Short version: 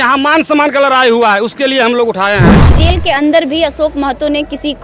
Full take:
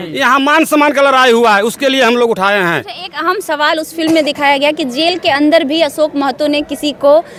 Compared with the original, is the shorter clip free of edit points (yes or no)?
no